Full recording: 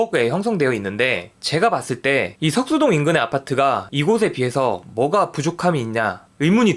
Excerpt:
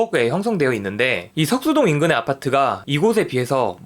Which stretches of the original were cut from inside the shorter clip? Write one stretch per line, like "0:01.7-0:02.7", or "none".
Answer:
0:01.3-0:02.3